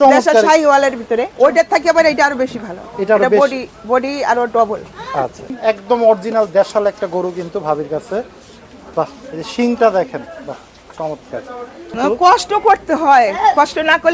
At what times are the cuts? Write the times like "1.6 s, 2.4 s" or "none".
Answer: 1.3 s, 5.5 s, 11.9 s